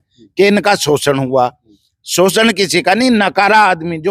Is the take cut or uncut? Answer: uncut